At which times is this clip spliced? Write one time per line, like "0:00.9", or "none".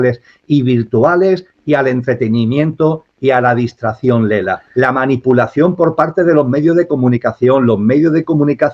0:04.6

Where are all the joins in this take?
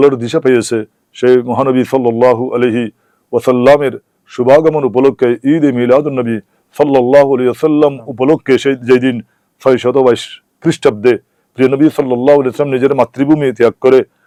none

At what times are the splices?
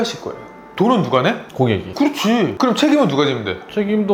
none

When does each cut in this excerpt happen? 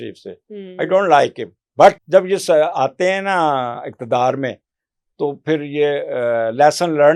0:02.0

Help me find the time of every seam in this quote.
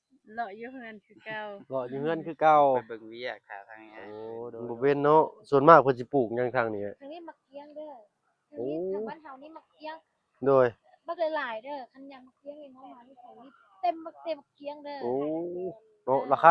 0:04.5

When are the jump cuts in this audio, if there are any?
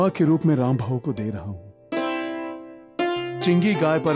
none

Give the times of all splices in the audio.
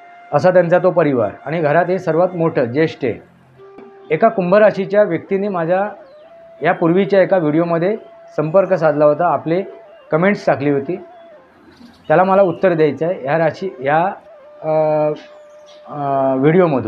0:03.9

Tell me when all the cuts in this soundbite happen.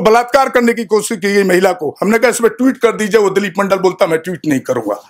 none

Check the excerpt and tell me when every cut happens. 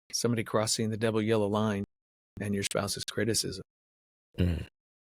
none

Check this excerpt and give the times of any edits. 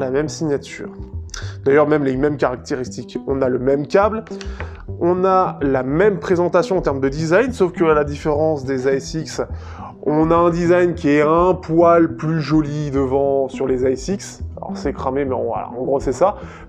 none

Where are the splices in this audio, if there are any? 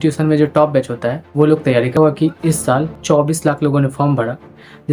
0:02.0

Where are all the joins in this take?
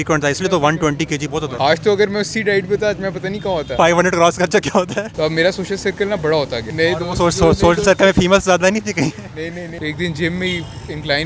0:01.5
0:03.7
0:05.1
0:06.6
0:09.7

